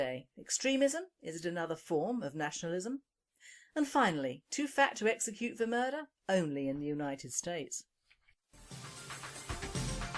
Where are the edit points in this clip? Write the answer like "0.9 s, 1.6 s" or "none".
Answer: 7.3 s